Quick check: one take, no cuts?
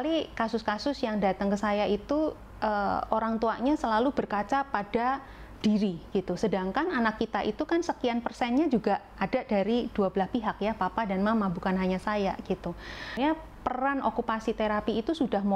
no; 1 cut; at 13.2 s

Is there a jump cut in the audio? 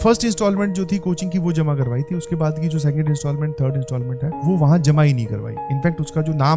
no; 0 cuts

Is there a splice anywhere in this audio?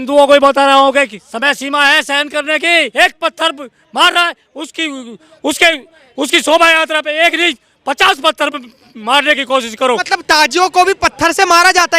yes; 2 cuts; at 2.9 s, 10.0 s

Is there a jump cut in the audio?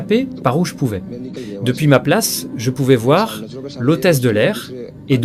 no; 0 cuts

